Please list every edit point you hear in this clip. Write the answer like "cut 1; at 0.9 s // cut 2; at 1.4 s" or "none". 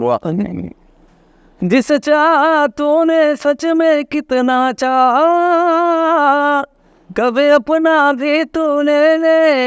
none

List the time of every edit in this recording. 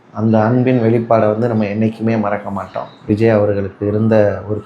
cut 1; at 3.1 s

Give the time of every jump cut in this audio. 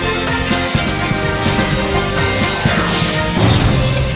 none

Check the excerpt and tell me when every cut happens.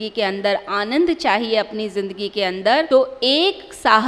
cut 1; at 2.9 s

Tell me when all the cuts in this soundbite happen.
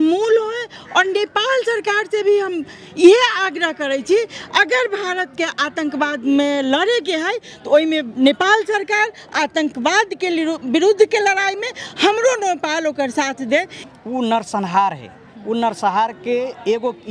cut 1; at 13.8 s

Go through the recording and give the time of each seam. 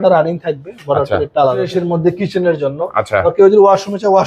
cut 1; at 1.7 s

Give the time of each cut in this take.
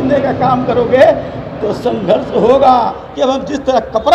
cut 1; at 3.0 s

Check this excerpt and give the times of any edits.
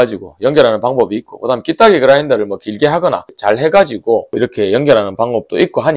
cut 1; at 3.3 s // cut 2; at 4.3 s

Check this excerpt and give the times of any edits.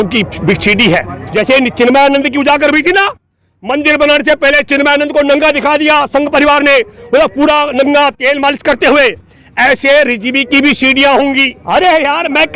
cut 1; at 1.2 s // cut 2; at 11.6 s

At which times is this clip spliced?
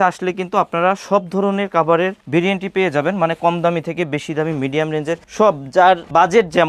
none

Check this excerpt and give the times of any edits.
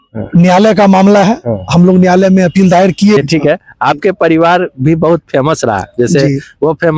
cut 1; at 3.2 s

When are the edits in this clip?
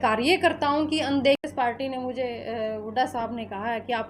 cut 1; at 1.4 s

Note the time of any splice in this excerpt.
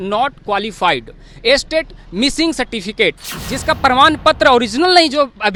none

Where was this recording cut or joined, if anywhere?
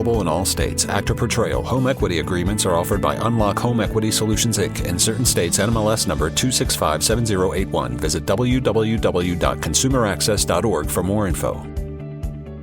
cut 1; at 11.6 s

